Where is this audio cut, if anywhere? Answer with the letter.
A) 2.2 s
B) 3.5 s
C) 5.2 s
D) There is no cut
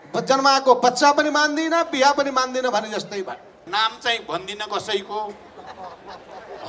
B